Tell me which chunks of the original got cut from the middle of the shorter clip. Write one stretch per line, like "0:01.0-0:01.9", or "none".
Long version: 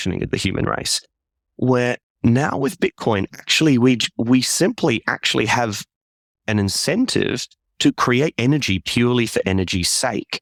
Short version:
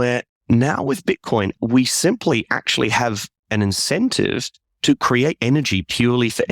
0:03.3-0:04.1
0:05.9-0:06.3